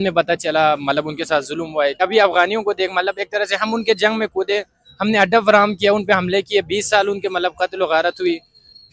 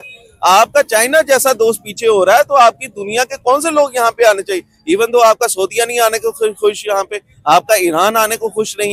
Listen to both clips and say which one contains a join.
first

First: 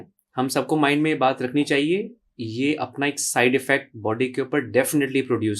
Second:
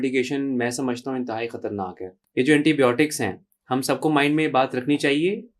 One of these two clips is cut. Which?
second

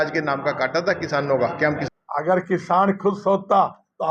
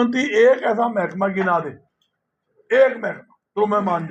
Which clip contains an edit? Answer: first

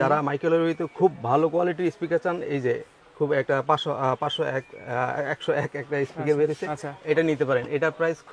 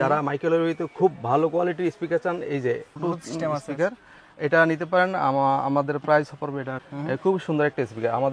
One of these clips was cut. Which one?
second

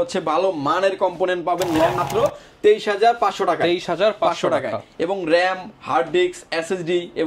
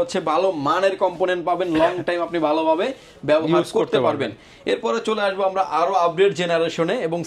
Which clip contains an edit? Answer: first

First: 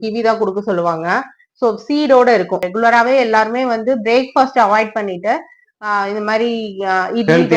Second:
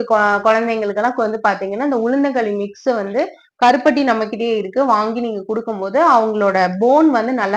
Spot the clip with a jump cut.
first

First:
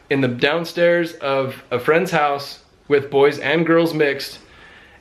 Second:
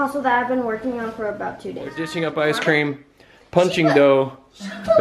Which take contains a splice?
second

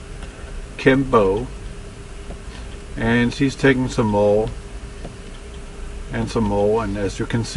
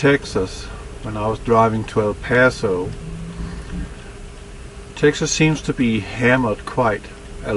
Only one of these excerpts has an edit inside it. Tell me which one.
first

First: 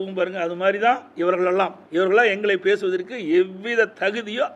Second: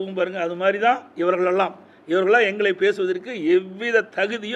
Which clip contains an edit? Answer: first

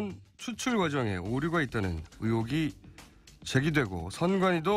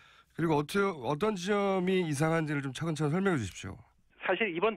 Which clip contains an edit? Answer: second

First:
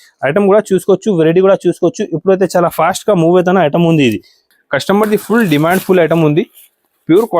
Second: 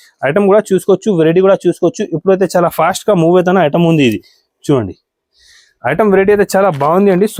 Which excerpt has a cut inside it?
first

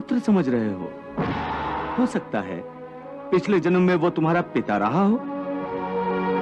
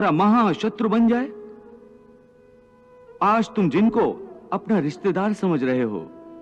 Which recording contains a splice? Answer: first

